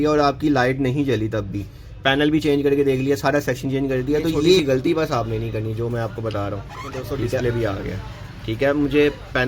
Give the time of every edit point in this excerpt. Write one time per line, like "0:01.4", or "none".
0:04.6
0:07.4